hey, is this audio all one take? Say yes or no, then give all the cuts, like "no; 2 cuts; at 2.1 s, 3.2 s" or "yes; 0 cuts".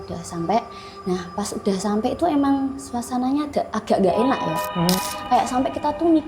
no; 1 cut; at 5.0 s